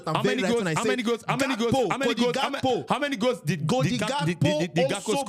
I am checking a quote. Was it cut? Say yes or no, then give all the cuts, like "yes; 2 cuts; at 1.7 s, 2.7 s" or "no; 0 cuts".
no; 0 cuts